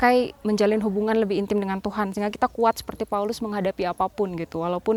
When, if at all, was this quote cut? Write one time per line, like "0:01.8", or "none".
none

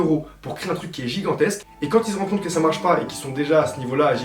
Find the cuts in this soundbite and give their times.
none

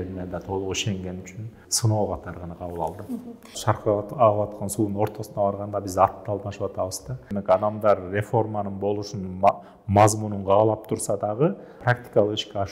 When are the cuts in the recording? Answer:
0:01.6
0:03.6
0:07.3
0:11.8

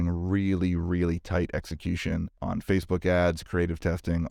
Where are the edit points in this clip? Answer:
0:02.3

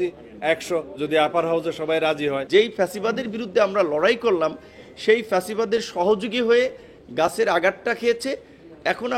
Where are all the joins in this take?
0:02.4

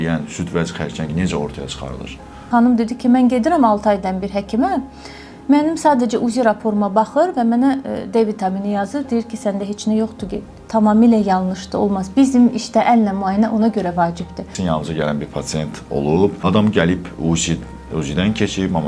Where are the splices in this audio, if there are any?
0:02.5
0:14.6

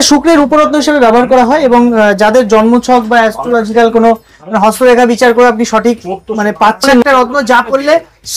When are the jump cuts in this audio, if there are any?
0:07.0

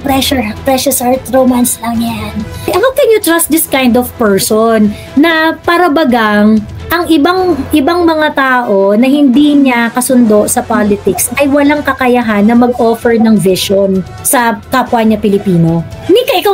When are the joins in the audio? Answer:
0:02.6

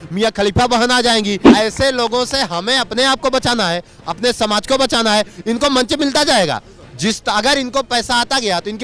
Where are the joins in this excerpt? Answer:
0:01.4

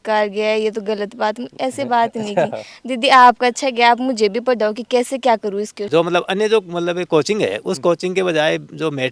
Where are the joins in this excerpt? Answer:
0:05.8

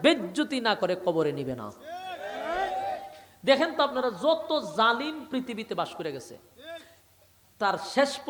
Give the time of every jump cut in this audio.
none

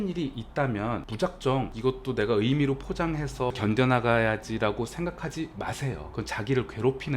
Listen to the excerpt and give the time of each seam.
0:01.1
0:01.7
0:03.6

